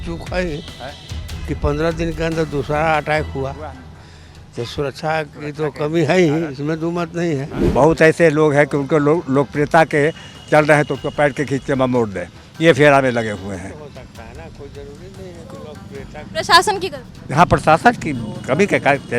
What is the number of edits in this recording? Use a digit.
1